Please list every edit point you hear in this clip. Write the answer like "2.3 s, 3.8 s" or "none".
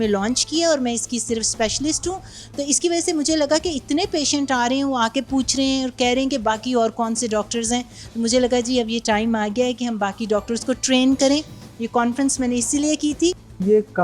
none

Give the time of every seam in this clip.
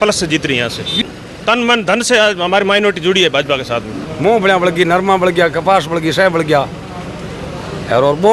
1.0 s, 4.0 s

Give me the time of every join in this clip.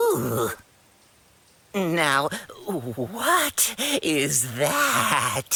none

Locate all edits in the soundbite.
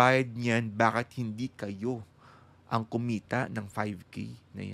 none

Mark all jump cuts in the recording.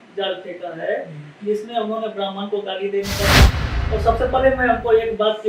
3.5 s

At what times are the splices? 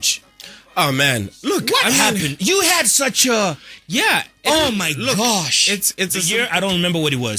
6.3 s

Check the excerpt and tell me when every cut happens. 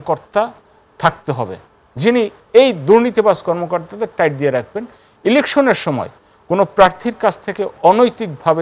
none

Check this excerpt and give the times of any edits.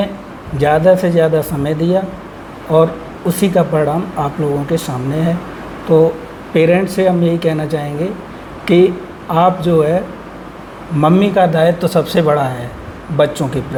none

